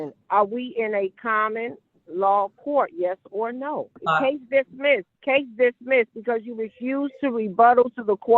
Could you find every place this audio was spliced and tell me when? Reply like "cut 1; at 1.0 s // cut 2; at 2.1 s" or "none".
cut 1; at 4.0 s // cut 2; at 5.1 s